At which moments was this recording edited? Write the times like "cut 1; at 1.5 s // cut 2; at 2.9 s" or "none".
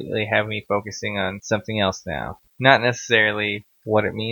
cut 1; at 1.4 s // cut 2; at 2.6 s